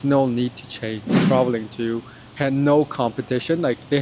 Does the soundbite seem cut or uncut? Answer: cut